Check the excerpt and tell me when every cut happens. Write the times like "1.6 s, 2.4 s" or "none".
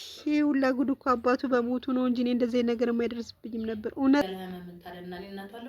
4.2 s